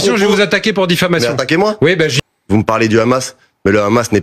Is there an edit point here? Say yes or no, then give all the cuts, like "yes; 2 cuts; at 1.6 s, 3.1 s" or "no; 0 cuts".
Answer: yes; 1 cut; at 2.1 s